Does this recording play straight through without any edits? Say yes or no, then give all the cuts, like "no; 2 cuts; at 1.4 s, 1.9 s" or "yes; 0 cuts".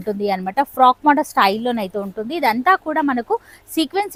yes; 0 cuts